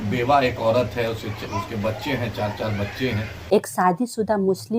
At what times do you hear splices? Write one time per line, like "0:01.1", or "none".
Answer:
0:03.3